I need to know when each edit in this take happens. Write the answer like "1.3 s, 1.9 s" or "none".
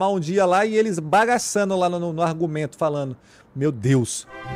1.0 s